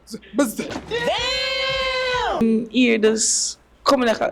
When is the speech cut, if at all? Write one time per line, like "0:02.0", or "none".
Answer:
0:02.4